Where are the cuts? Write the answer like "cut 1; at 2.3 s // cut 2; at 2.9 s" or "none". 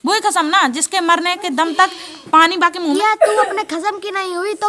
cut 1; at 2.8 s